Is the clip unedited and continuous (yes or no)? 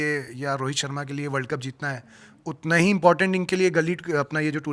yes